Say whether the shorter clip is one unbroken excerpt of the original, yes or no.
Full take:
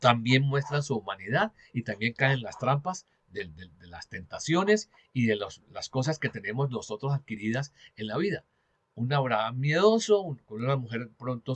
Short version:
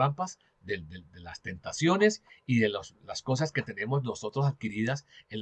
yes